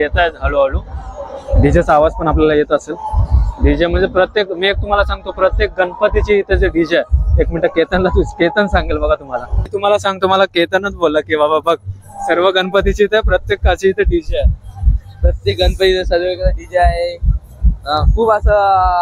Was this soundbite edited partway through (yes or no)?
no